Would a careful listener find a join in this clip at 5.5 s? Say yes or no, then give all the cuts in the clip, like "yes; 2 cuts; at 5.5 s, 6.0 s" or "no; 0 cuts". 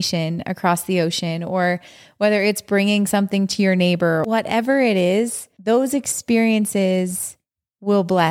yes; 2 cuts; at 4.2 s, 5.5 s